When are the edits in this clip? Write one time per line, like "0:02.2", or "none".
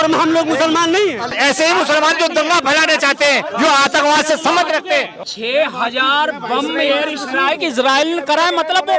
0:01.3
0:05.2